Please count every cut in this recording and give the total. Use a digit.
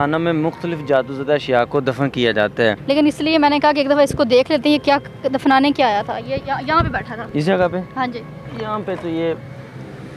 3